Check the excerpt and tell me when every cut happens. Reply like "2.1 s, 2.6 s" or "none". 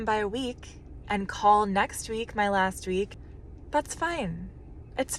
3.2 s